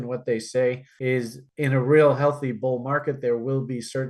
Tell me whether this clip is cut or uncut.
uncut